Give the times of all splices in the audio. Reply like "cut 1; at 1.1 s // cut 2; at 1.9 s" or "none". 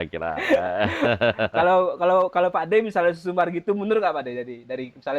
none